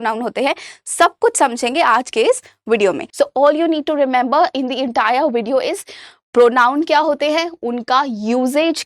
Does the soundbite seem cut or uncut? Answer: cut